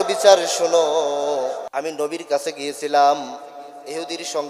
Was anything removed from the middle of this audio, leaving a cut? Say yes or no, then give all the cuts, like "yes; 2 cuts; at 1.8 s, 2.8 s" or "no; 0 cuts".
yes; 1 cut; at 1.6 s